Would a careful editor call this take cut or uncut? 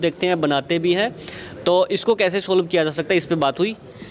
uncut